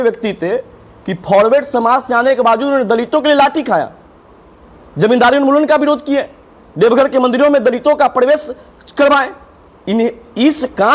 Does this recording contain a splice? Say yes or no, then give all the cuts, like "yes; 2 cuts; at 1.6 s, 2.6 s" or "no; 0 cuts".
no; 0 cuts